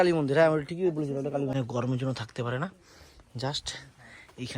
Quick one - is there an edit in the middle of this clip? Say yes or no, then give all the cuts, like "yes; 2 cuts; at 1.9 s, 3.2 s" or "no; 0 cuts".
yes; 1 cut; at 1.5 s